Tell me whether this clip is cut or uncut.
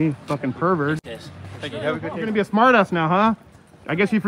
cut